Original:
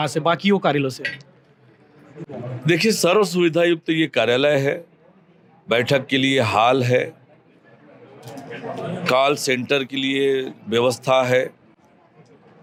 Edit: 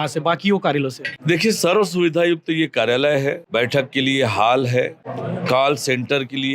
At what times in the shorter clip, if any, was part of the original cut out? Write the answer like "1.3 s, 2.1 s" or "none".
1.1 s, 3.4 s, 5.1 s